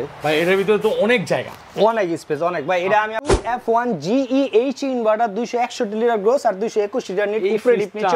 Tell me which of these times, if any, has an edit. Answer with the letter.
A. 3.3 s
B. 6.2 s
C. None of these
A